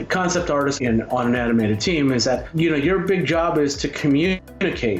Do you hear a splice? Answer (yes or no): yes